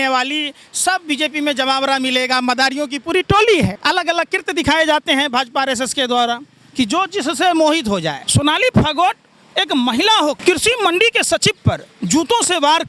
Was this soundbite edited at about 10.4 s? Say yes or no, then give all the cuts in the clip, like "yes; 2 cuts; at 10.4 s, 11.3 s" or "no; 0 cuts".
yes; 3 cuts; at 3.8 s, 8.2 s, 10.4 s